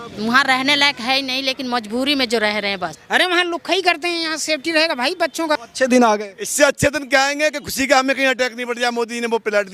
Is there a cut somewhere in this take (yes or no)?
yes